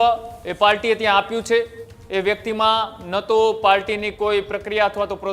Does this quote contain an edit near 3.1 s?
no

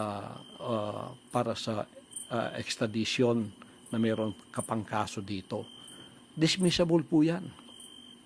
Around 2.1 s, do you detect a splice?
yes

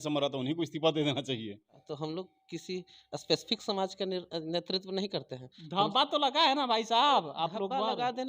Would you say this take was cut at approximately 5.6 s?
no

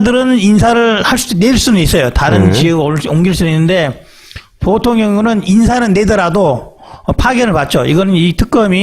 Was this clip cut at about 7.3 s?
no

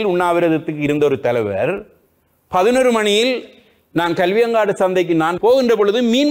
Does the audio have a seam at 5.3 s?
yes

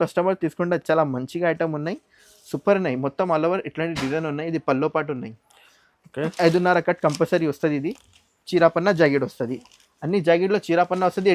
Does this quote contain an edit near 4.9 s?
no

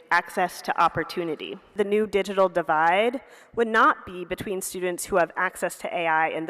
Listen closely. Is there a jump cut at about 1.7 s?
yes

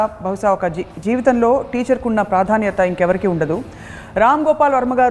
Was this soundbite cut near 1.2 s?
no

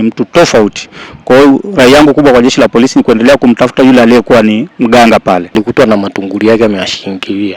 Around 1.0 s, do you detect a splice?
no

